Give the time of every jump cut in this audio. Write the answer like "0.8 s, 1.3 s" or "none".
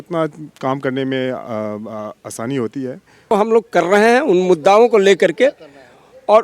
3.3 s